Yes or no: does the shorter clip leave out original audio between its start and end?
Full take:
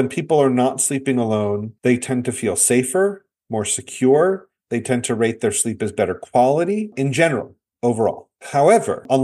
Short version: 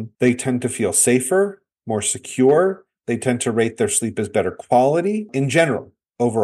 no